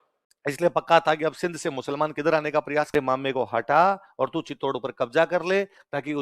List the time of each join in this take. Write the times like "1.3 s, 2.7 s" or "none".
2.9 s